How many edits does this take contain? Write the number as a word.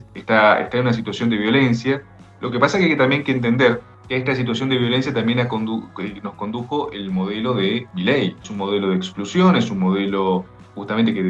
two